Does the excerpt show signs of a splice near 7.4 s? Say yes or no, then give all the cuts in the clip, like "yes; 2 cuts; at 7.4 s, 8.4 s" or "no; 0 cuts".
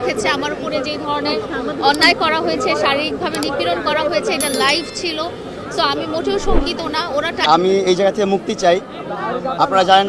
yes; 1 cut; at 7.4 s